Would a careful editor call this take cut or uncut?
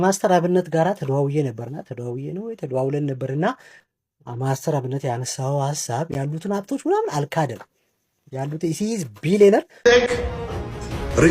cut